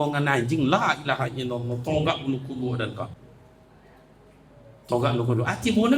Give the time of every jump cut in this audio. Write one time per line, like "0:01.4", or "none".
0:03.2